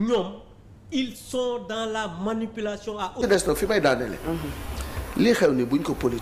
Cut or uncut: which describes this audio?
uncut